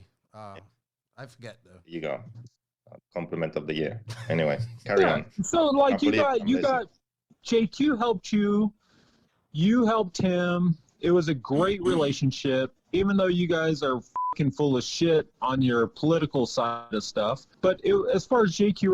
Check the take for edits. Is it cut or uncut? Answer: cut